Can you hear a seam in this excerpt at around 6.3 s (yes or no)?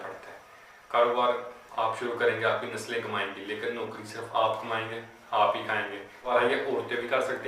yes